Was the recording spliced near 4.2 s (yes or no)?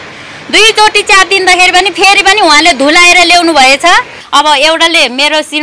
yes